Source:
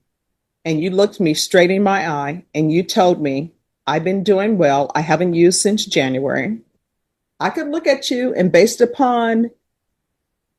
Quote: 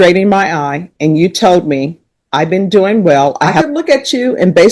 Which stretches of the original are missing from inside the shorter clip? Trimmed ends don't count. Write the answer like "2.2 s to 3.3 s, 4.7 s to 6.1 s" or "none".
5.1 s to 7.5 s